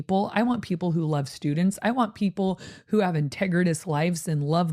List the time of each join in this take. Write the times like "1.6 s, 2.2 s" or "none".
none